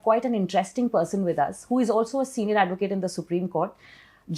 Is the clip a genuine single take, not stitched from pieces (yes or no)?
yes